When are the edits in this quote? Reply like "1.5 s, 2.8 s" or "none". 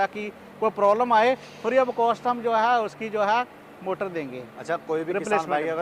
none

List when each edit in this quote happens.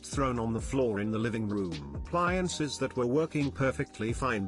2.0 s

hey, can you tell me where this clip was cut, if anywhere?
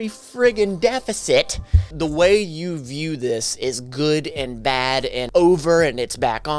1.9 s, 5.2 s

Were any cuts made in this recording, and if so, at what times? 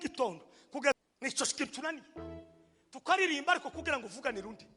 1.0 s

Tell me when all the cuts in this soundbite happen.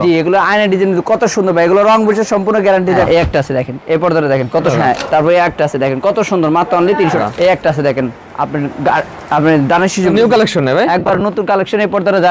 3.0 s, 4.7 s, 7.2 s, 10.1 s

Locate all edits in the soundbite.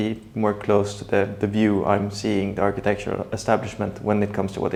none

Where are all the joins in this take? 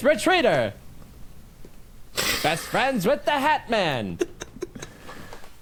none

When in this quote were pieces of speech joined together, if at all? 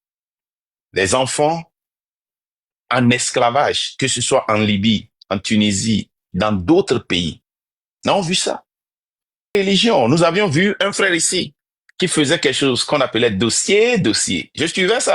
9.5 s

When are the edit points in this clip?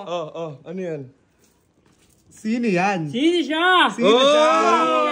none

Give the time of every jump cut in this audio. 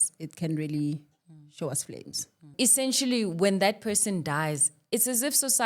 2.5 s

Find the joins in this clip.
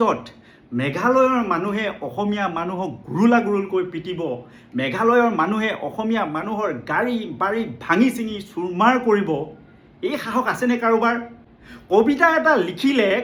none

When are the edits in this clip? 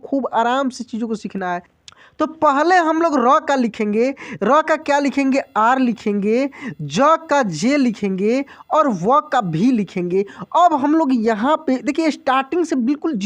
1.8 s

